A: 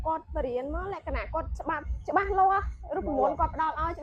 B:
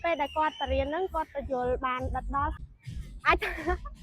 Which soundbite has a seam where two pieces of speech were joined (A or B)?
B